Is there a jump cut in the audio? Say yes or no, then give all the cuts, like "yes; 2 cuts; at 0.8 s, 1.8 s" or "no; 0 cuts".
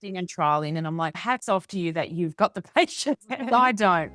yes; 1 cut; at 3.2 s